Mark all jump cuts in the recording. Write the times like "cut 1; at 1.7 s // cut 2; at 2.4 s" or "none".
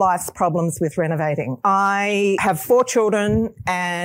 cut 1; at 1.5 s // cut 2; at 2.4 s